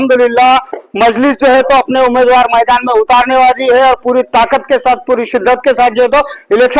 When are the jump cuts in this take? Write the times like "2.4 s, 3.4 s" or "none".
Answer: none